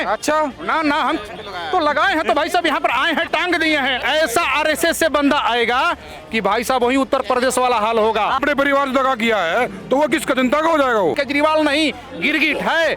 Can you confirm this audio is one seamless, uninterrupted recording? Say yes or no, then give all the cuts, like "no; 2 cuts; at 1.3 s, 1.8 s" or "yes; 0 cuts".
no; 3 cuts; at 4.0 s, 8.4 s, 11.2 s